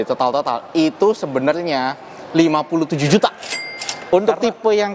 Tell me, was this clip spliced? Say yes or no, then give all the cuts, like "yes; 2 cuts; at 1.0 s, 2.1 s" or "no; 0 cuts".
yes; 1 cut; at 4.0 s